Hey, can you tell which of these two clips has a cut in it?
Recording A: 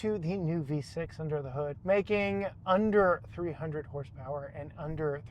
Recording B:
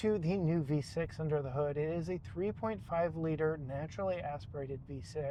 A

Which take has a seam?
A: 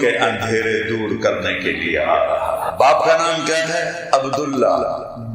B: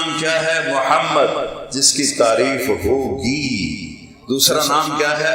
A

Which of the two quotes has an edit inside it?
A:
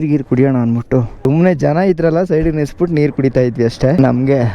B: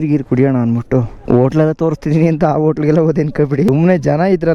A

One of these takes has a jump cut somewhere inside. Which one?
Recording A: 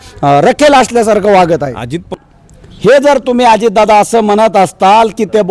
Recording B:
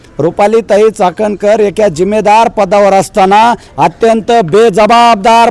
A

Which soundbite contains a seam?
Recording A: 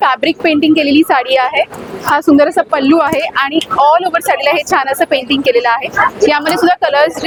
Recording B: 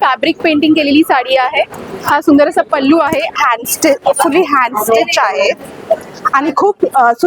B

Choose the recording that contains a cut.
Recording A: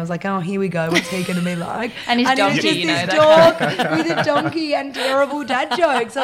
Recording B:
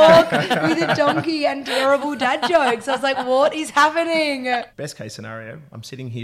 B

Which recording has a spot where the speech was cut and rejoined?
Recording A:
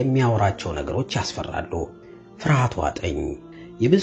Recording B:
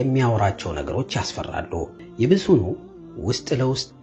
B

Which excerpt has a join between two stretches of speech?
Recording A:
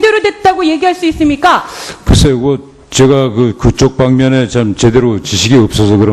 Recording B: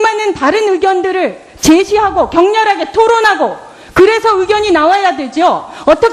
A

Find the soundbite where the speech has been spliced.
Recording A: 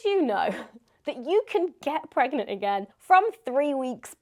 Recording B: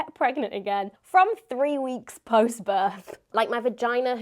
B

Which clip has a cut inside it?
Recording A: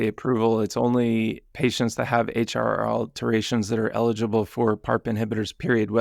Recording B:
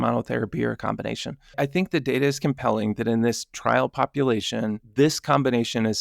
B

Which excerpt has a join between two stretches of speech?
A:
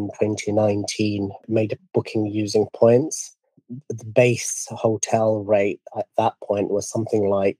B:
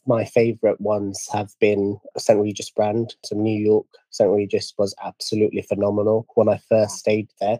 A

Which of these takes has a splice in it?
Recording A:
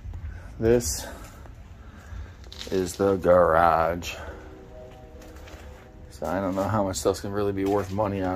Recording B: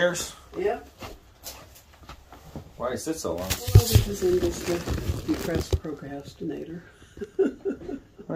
B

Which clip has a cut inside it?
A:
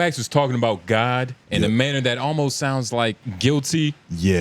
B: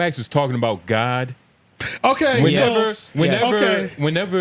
A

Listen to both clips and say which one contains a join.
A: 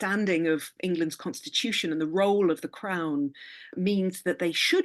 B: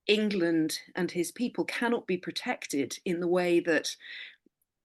A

